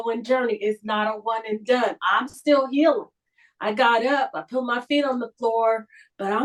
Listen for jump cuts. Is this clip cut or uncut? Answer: uncut